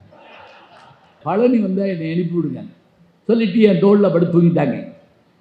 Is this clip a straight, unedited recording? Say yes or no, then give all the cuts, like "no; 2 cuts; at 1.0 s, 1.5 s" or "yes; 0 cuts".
no; 1 cut; at 1.2 s